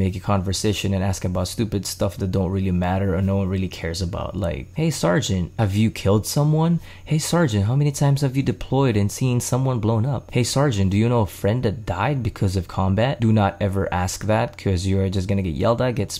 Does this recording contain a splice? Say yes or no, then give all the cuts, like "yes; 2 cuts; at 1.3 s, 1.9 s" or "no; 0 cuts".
yes; 4 cuts; at 4.7 s, 5.5 s, 10.2 s, 13.2 s